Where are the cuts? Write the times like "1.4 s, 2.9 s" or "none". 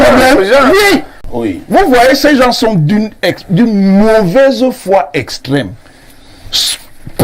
1.2 s